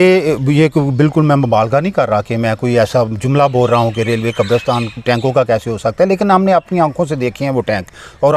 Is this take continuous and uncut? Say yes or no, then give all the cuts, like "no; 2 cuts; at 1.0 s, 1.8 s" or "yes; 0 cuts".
yes; 0 cuts